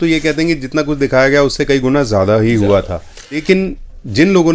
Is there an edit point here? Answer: yes; 1 cut; at 3.6 s

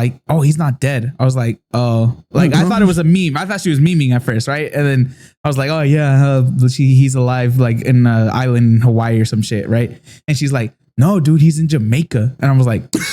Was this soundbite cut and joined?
no; 0 cuts

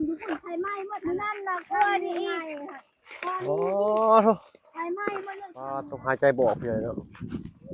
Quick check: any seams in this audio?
yes; 1 cut; at 5.8 s

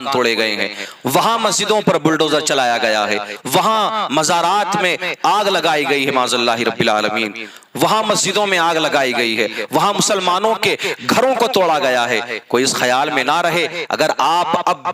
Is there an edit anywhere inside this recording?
no; 0 cuts

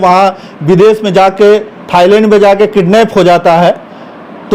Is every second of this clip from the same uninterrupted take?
yes; 0 cuts

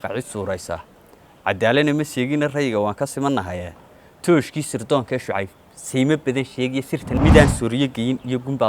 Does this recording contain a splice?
yes; 1 cut; at 7.1 s

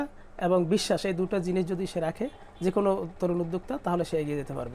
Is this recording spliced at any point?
no; 0 cuts

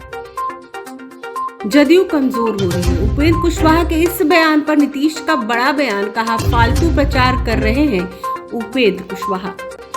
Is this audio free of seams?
no; 1 cut; at 0.9 s

